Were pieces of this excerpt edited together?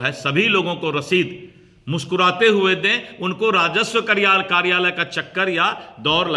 no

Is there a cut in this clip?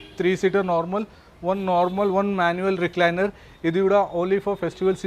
no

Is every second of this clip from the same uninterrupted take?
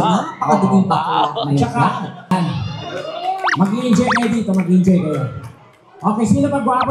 no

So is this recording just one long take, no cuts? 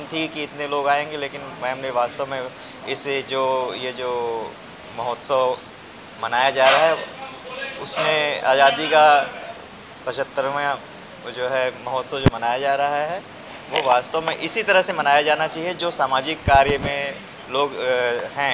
yes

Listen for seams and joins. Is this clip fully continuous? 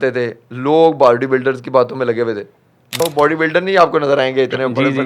no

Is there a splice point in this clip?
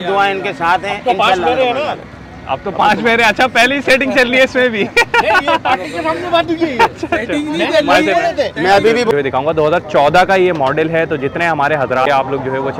yes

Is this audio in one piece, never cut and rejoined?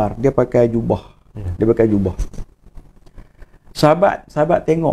yes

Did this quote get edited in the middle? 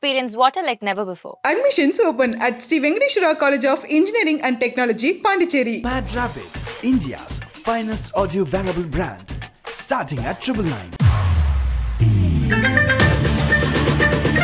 no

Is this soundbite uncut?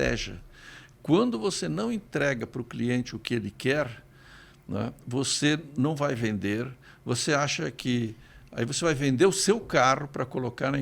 yes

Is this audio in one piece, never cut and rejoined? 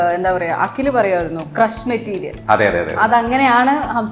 yes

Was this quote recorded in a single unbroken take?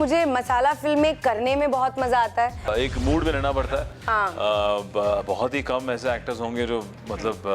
no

